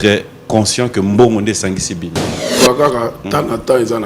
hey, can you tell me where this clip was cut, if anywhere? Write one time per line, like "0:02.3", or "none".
0:02.6